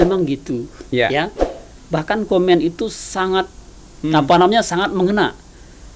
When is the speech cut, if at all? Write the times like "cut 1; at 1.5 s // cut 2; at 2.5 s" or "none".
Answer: none